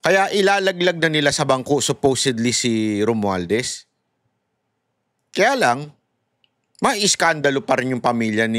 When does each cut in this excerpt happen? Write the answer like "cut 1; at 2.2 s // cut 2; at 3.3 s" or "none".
none

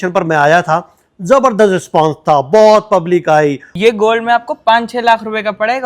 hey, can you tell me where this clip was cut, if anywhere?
cut 1; at 3.7 s

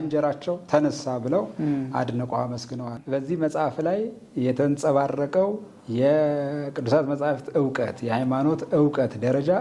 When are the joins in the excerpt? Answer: cut 1; at 3.0 s

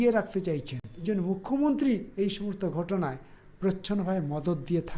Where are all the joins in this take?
cut 1; at 1.0 s

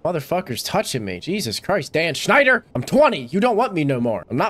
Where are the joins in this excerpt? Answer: cut 1; at 2.7 s

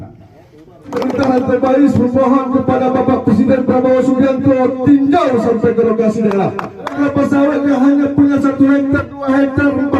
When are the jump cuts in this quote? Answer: cut 1; at 0.9 s // cut 2; at 7.0 s

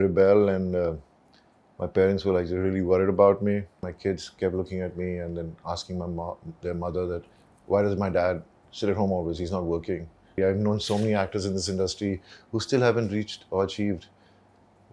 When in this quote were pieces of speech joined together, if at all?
cut 1; at 3.9 s // cut 2; at 10.4 s

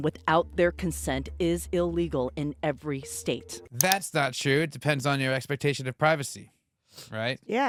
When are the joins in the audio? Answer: none

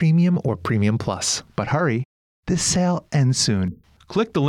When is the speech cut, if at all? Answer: none

